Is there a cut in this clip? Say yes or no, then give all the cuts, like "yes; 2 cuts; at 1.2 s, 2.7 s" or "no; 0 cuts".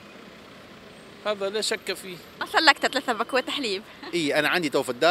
yes; 1 cut; at 2.5 s